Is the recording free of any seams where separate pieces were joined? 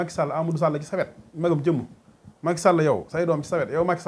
yes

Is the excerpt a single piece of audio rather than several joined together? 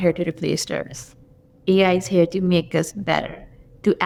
yes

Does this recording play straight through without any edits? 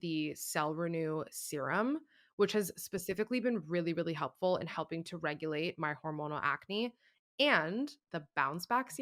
no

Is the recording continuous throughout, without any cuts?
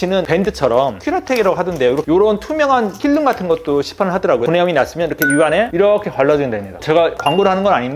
yes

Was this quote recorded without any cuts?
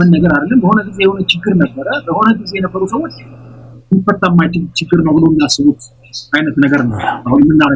yes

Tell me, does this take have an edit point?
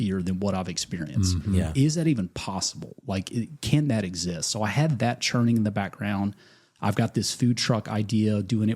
no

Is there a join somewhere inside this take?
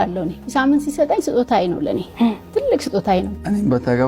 no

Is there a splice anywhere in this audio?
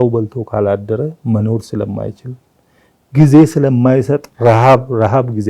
no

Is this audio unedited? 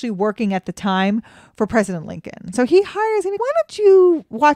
no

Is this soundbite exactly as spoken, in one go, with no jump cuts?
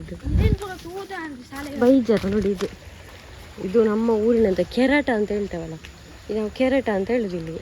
no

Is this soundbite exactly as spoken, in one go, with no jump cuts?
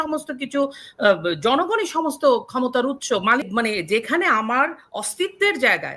no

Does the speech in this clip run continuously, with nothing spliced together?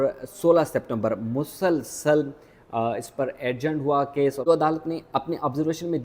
no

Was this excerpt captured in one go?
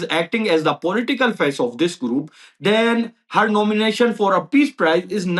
yes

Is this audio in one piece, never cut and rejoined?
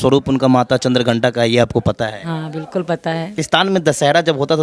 no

